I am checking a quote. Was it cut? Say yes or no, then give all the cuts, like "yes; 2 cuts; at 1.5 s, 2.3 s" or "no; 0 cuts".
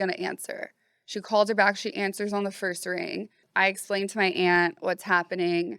yes; 1 cut; at 3.4 s